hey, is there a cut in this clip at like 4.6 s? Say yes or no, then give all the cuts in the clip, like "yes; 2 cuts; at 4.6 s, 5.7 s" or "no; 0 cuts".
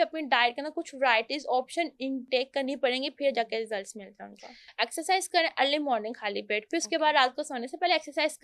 yes; 1 cut; at 4.6 s